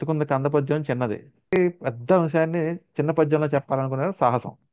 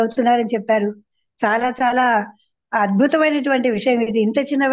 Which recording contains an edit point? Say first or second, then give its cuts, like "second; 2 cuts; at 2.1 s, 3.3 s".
first; 1 cut; at 1.6 s